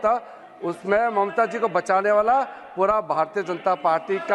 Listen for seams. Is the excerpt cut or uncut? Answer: uncut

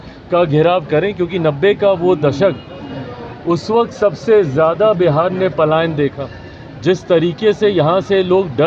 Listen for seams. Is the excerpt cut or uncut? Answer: uncut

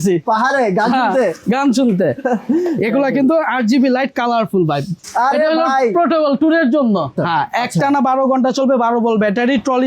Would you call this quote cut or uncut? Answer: cut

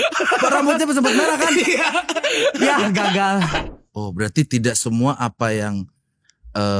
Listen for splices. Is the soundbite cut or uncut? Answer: cut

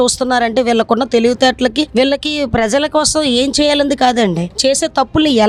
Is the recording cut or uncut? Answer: uncut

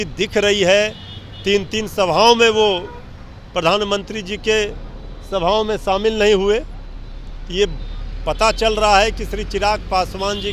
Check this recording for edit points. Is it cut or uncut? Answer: uncut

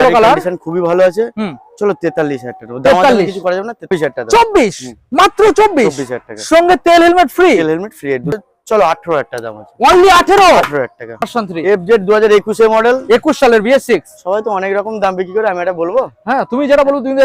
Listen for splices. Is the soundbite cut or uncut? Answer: cut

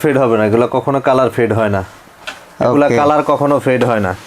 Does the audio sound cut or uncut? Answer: uncut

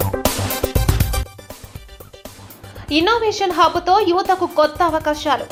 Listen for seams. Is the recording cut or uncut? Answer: uncut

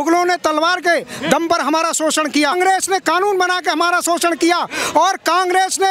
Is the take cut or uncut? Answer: cut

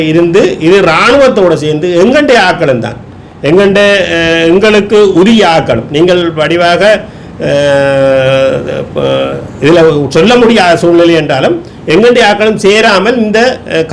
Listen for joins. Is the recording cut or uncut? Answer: uncut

